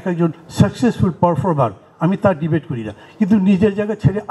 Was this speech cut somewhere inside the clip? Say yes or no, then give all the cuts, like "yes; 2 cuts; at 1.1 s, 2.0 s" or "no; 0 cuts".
no; 0 cuts